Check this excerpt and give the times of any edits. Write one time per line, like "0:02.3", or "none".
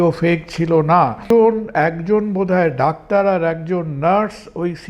0:01.3